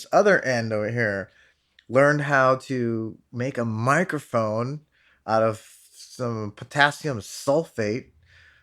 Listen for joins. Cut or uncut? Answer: uncut